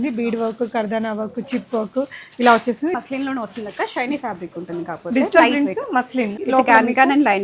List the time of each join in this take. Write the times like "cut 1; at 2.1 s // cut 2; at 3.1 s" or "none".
cut 1; at 2.9 s // cut 2; at 6.4 s